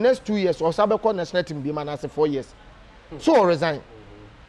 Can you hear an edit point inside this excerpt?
no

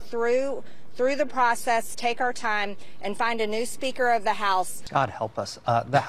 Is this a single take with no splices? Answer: no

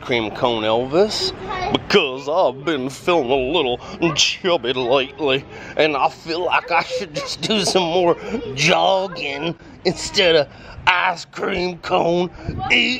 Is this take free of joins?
yes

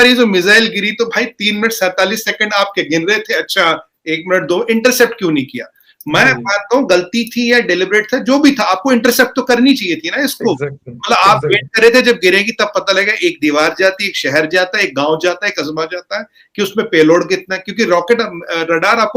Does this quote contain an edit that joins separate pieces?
no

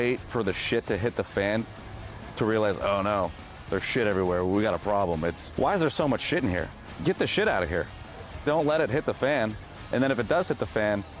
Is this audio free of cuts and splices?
no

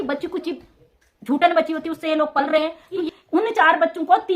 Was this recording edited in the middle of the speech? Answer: yes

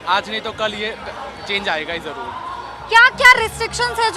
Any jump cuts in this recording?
no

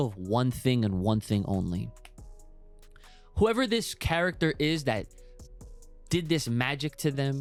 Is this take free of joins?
yes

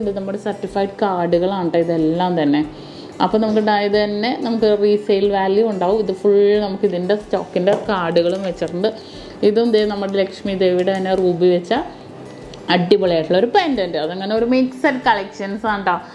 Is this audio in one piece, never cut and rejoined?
yes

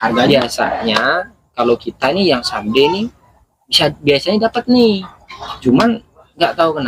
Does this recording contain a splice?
no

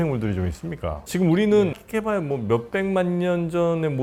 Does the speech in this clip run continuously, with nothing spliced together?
yes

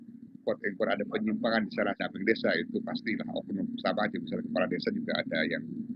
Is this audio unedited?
no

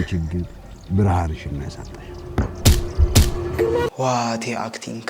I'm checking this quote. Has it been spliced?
yes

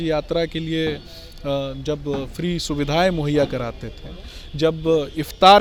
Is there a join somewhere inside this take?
no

